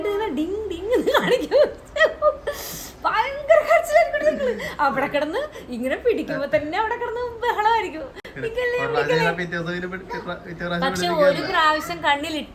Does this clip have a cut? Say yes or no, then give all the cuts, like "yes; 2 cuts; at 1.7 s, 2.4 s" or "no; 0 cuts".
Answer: no; 0 cuts